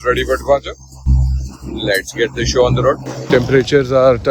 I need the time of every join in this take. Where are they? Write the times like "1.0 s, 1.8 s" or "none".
3.1 s